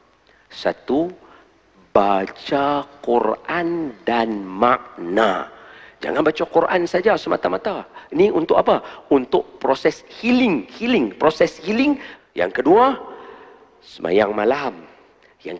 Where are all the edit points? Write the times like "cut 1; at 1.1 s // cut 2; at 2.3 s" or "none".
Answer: cut 1; at 12.1 s